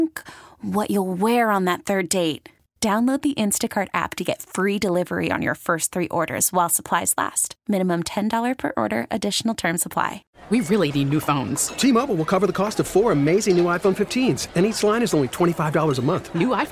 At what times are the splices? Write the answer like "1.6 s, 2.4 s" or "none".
10.4 s